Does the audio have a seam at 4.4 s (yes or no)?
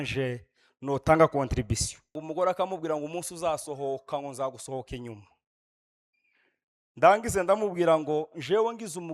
no